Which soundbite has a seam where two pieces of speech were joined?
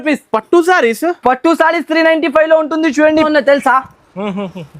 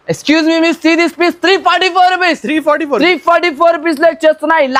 first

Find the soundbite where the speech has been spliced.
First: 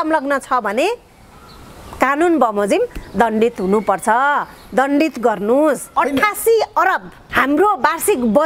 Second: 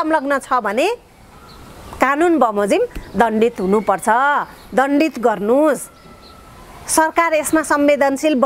first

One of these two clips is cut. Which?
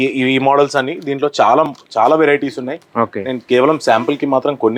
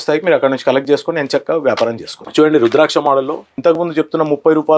second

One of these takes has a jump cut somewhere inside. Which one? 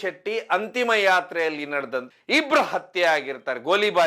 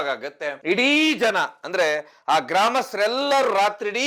first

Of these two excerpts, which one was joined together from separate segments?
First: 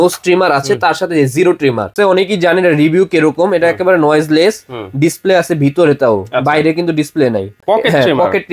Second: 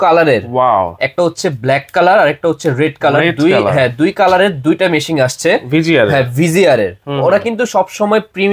first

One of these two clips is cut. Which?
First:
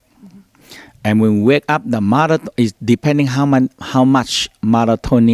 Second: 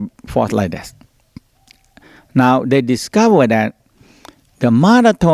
second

